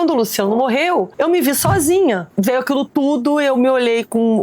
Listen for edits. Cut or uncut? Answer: cut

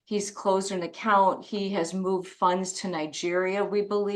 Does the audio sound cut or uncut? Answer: uncut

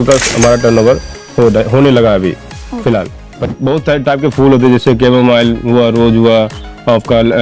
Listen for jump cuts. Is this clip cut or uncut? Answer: cut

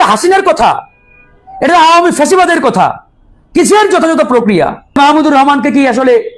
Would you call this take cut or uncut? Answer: cut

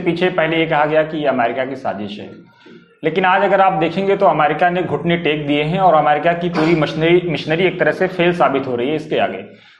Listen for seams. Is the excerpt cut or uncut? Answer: uncut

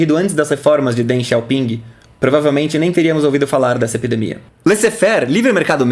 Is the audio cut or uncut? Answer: cut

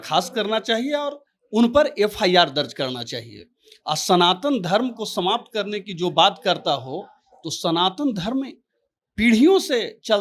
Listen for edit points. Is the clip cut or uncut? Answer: uncut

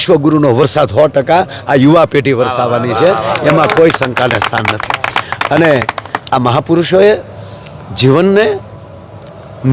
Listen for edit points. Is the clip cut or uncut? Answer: uncut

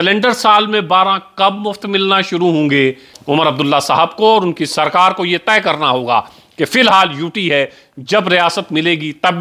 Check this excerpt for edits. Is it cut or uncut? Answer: cut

